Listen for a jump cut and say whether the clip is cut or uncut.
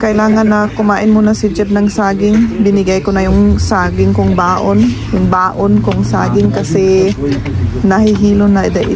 uncut